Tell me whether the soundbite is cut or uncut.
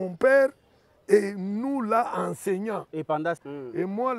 cut